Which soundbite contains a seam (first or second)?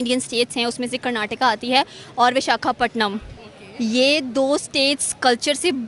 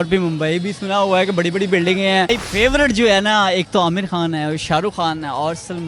second